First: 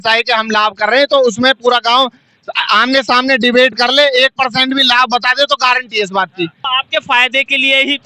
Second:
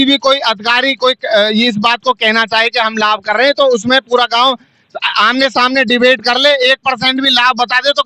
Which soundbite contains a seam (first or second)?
first